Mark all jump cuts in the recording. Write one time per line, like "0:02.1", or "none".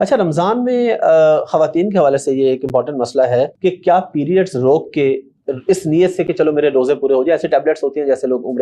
0:03.5